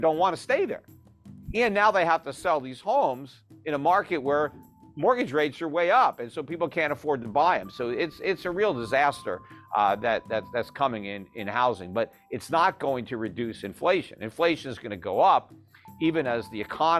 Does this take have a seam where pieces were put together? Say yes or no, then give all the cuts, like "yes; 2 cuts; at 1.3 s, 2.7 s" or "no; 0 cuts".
no; 0 cuts